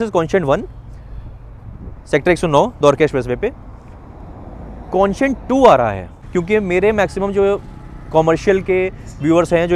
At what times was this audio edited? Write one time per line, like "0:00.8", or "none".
0:06.2